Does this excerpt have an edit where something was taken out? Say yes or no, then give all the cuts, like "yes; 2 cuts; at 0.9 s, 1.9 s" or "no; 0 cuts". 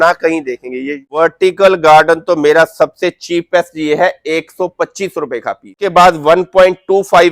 yes; 2 cuts; at 1.0 s, 5.8 s